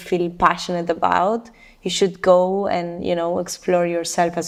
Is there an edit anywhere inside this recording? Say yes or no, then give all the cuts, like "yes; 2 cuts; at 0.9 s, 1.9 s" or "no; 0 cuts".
no; 0 cuts